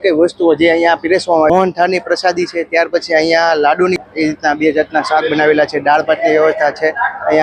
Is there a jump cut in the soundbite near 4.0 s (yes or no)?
yes